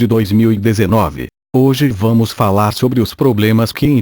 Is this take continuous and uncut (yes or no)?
no